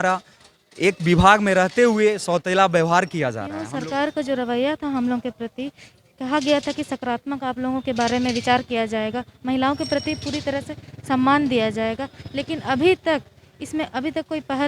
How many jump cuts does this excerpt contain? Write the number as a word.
one